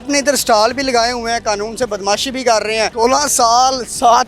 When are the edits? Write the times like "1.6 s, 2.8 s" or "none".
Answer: 2.9 s